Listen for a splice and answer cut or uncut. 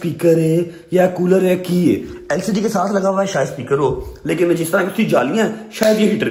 uncut